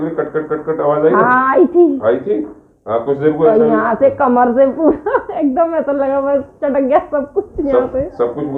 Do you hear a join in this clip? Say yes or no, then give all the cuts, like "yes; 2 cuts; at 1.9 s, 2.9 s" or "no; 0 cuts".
no; 0 cuts